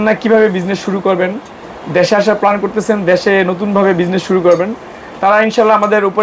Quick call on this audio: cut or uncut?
uncut